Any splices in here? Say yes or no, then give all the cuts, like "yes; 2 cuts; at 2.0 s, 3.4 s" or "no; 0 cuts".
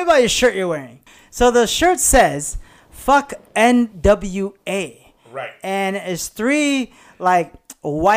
yes; 1 cut; at 1.1 s